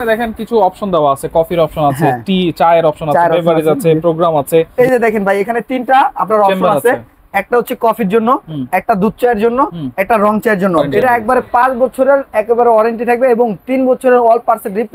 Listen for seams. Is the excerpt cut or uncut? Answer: cut